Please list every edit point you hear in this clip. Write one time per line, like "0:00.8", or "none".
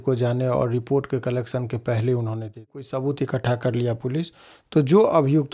0:02.7

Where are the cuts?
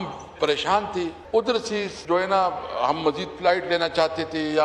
0:01.2
0:01.9

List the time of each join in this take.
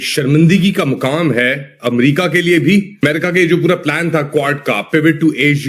0:03.0

